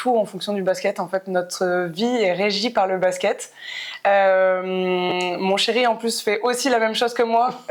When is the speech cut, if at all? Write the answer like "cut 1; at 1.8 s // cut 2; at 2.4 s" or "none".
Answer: none